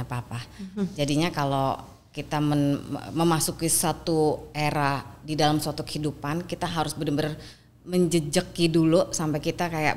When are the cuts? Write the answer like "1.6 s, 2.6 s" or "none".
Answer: none